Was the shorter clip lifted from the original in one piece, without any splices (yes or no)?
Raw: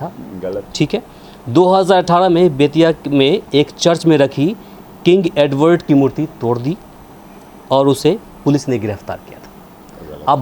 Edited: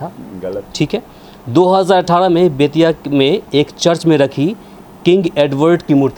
yes